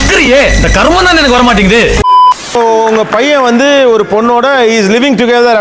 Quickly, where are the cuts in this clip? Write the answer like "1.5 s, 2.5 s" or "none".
2.4 s